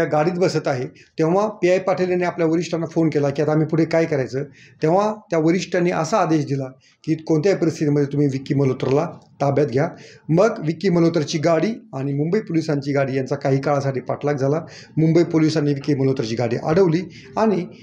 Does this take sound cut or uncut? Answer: uncut